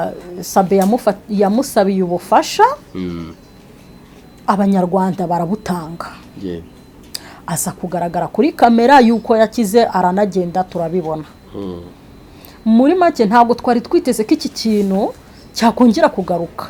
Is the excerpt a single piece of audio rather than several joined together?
yes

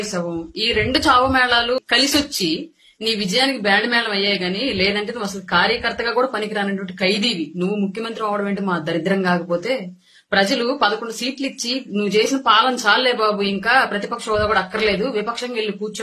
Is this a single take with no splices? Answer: no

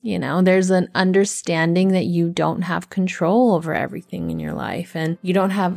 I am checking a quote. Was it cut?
no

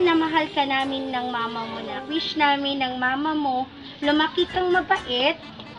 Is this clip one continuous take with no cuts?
no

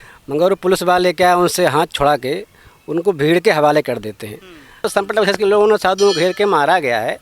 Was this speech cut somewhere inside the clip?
yes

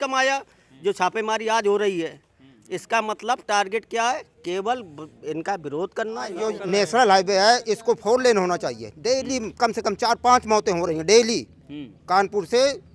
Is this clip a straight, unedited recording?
no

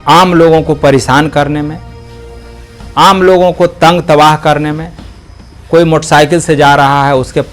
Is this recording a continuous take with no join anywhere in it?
yes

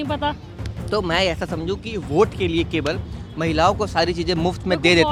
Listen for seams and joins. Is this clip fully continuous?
yes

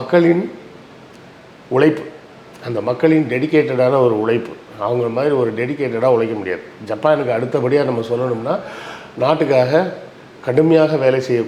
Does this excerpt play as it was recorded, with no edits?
yes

